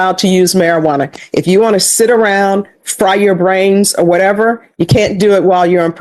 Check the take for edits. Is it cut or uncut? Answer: uncut